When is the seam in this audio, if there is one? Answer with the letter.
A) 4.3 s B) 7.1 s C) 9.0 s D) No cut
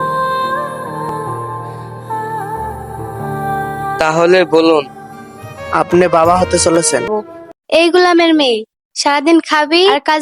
B